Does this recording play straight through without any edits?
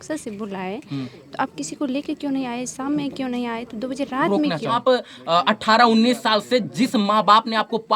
no; 1 cut; at 4.8 s

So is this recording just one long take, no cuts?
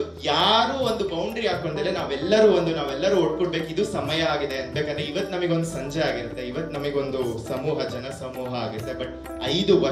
no; 1 cut; at 4.7 s

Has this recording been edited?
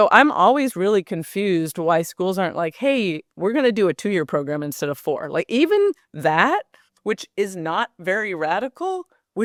no; 0 cuts

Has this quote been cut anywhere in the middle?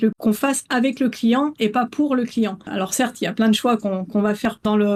no; 0 cuts

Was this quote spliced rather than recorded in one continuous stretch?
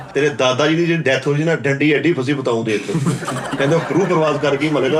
no; 0 cuts

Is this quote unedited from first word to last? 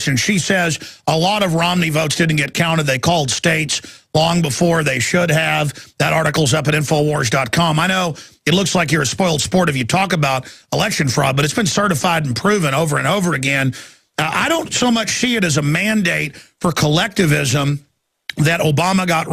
yes; 0 cuts

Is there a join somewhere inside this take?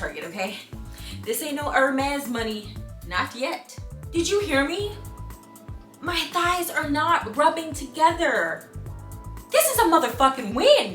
yes; 1 cut; at 3.6 s

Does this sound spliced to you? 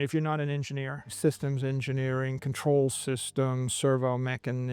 yes; 1 cut; at 1.0 s

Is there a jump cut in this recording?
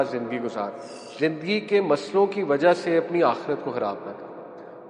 yes; 1 cut; at 1.1 s

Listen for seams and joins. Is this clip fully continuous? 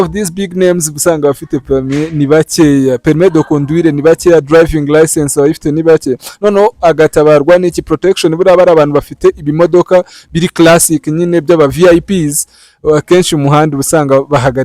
yes; 0 cuts

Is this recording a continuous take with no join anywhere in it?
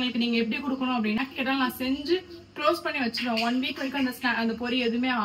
no; 1 cut; at 1.2 s

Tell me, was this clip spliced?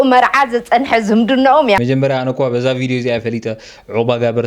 yes; 1 cut; at 1.8 s

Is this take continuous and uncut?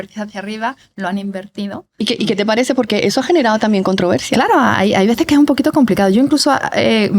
yes; 0 cuts

